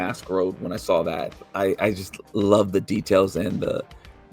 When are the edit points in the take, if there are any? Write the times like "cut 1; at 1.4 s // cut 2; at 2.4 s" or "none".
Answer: cut 1; at 1.4 s